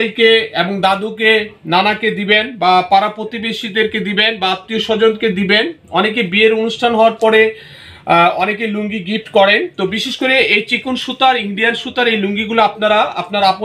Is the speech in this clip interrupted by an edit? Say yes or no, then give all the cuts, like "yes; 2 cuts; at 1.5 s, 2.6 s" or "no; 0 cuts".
no; 0 cuts